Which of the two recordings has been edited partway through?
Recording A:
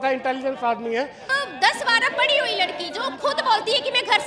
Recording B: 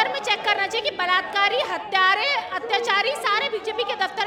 A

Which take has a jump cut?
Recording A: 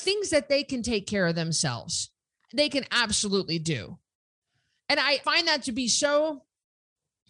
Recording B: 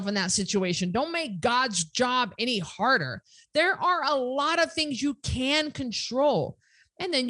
A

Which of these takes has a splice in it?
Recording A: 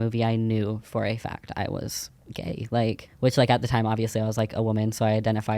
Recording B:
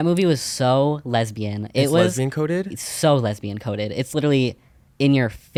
A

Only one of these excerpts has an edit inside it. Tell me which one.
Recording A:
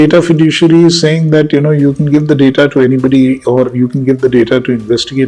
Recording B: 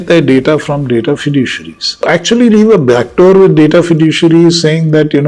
B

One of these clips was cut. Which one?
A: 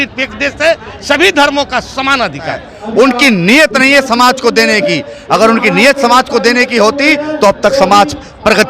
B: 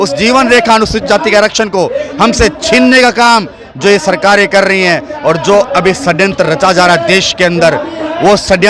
A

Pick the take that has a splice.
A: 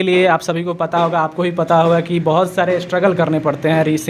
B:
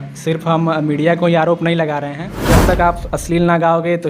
B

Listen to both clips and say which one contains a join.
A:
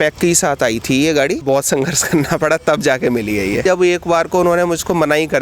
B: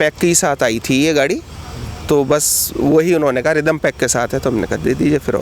A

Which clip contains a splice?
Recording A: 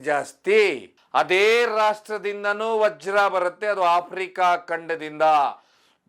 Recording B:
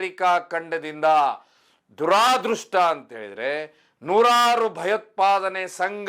A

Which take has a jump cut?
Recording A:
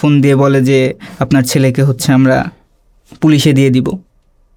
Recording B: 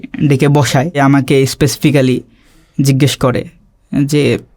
B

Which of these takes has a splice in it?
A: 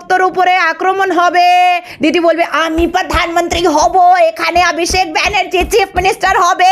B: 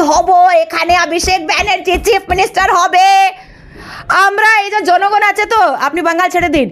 A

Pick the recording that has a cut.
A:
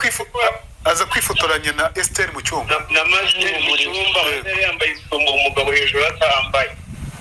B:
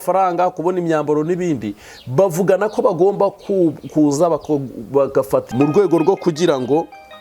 B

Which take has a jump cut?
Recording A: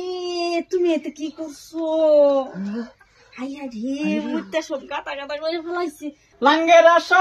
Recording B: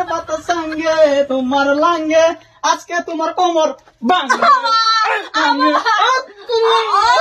A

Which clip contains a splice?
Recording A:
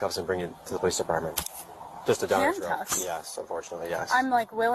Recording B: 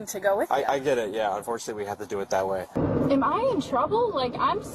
B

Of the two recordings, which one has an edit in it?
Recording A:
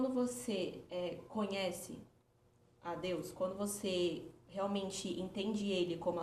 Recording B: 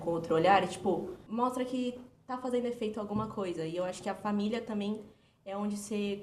B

